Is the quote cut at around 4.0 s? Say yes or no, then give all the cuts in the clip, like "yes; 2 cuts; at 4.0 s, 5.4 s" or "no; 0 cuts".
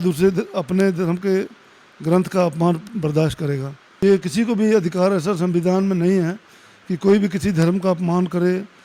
yes; 1 cut; at 4.0 s